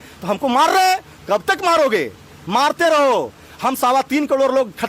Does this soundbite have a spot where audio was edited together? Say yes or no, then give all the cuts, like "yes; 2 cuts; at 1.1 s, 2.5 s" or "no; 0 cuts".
no; 0 cuts